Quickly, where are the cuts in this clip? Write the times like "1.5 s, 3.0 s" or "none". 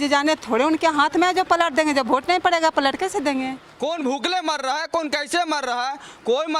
3.6 s